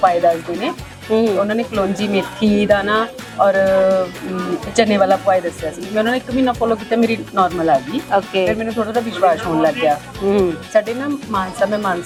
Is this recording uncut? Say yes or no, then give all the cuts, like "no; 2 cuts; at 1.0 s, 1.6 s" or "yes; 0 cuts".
yes; 0 cuts